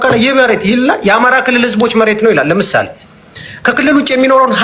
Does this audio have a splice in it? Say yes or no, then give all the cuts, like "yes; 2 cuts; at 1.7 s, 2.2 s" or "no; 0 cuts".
no; 0 cuts